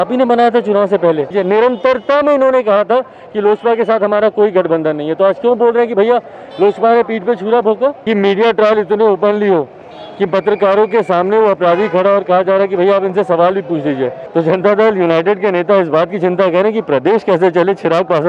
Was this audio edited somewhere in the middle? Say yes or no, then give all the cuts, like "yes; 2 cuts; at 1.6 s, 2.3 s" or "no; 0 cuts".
yes; 3 cuts; at 1.3 s, 8.0 s, 14.2 s